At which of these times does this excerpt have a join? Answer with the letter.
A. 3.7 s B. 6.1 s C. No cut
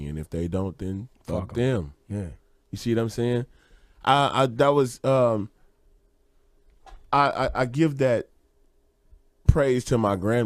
B